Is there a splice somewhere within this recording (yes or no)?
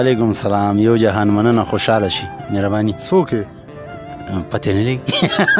no